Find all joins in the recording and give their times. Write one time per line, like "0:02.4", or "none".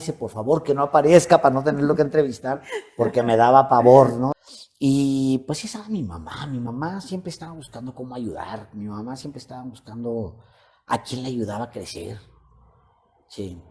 0:04.3